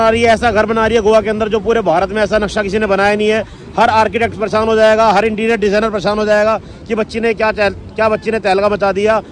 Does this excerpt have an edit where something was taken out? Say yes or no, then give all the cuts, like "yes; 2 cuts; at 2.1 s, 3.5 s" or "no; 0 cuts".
no; 0 cuts